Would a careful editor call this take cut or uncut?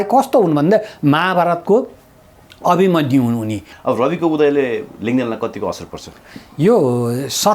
cut